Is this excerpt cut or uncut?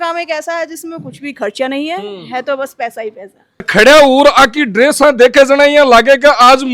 cut